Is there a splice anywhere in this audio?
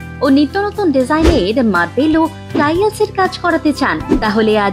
no; 0 cuts

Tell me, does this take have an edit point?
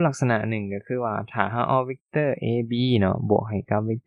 no; 0 cuts

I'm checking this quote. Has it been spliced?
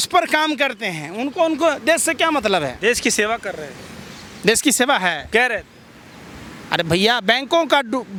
no; 0 cuts

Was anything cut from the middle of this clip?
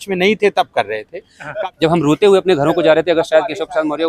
yes; 1 cut; at 1.5 s

